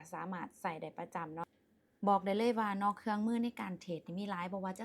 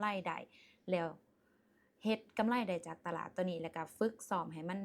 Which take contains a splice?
first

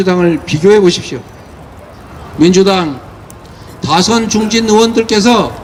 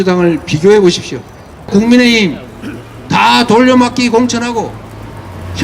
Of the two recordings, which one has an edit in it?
second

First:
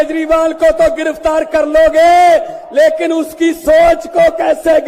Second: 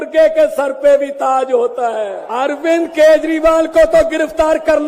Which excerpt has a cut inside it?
second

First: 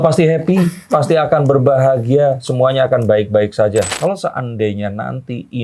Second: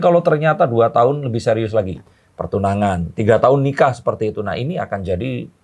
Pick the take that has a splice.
first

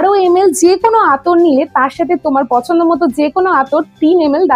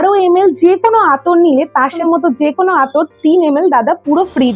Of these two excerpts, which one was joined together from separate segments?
second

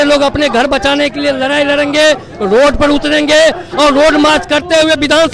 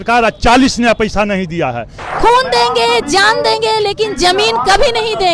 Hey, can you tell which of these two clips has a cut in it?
second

